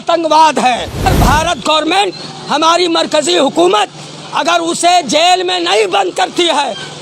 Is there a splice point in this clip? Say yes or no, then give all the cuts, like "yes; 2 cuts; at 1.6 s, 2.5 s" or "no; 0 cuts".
yes; 1 cut; at 1.0 s